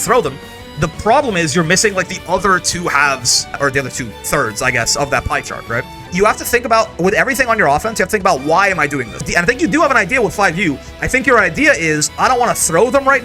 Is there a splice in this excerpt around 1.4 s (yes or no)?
no